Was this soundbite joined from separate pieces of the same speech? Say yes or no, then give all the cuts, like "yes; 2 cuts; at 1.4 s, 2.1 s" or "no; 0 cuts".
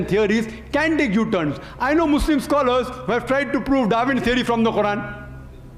no; 0 cuts